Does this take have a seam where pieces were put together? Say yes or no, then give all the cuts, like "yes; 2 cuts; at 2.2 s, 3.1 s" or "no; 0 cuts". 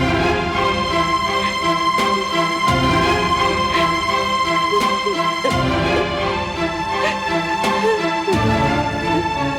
no; 0 cuts